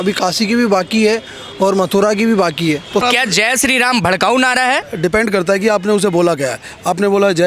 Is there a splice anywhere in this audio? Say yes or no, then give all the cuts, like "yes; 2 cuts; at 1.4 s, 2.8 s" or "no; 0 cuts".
yes; 2 cuts; at 3.0 s, 4.9 s